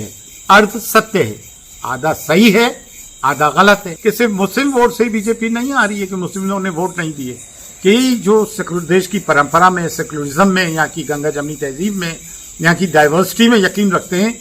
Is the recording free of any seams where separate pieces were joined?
no; 1 cut; at 3.9 s

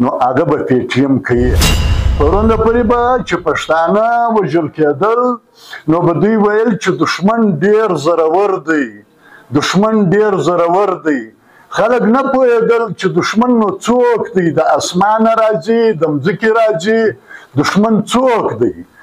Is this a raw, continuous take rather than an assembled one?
no; 1 cut; at 1.7 s

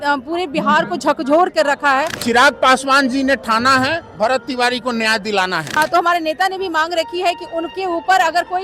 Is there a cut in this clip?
yes; 2 cuts; at 2.1 s, 5.7 s

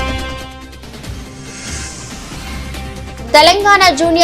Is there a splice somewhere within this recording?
no; 0 cuts

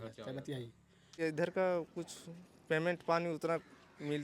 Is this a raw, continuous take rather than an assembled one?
no; 1 cut; at 1.1 s

